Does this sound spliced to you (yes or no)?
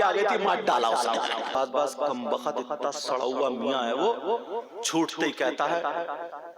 yes